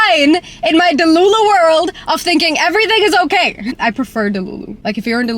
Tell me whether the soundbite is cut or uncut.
cut